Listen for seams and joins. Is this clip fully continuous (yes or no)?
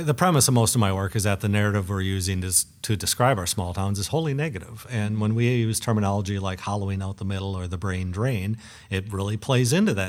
yes